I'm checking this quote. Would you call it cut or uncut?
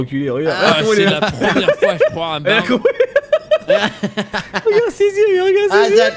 uncut